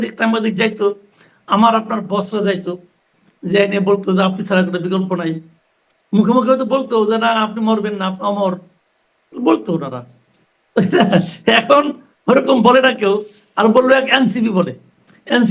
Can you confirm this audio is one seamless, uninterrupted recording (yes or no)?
yes